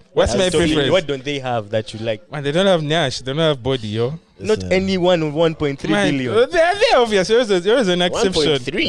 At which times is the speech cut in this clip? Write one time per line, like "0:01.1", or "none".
0:02.3